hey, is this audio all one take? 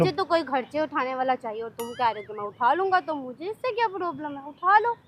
yes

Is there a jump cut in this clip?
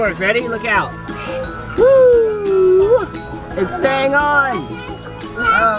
no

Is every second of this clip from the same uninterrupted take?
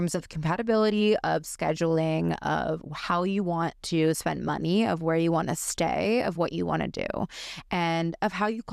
yes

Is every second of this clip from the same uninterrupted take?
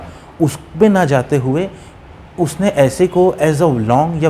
yes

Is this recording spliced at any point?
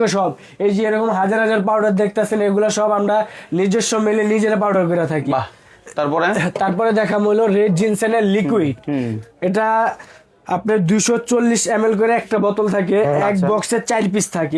no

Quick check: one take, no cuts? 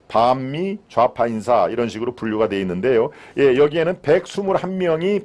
yes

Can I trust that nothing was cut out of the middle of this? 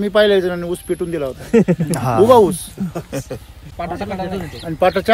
no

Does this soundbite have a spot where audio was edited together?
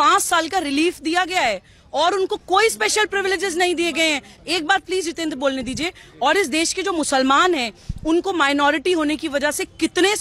no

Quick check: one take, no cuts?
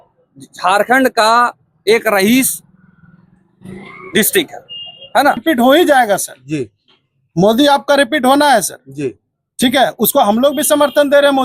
no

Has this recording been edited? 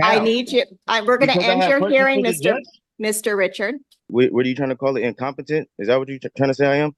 yes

